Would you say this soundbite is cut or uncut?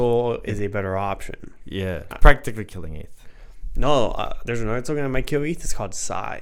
cut